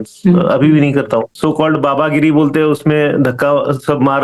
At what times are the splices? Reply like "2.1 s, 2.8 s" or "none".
1.3 s